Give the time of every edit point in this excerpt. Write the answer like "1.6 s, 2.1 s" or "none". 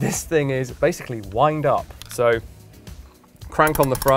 none